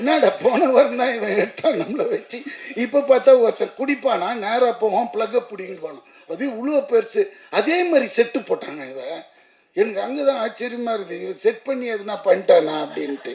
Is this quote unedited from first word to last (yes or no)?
yes